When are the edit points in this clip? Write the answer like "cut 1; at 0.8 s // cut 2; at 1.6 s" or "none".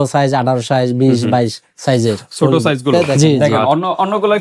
cut 1; at 3.4 s